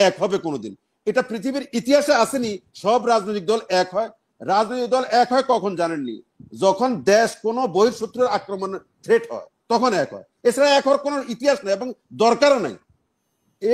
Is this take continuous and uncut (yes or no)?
yes